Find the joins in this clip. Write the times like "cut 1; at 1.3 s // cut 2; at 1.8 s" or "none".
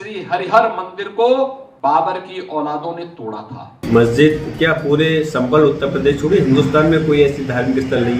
cut 1; at 1.6 s // cut 2; at 3.6 s